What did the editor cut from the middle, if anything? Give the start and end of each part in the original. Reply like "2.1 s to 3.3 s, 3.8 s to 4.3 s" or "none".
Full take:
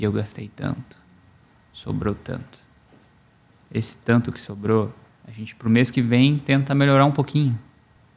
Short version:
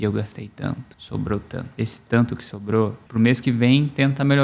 0.9 s to 1.7 s, 2.5 s to 3.7 s, 5.0 s to 5.5 s